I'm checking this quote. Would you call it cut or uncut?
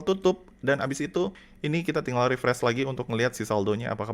cut